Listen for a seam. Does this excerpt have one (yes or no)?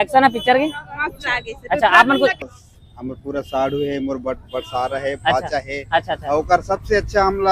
yes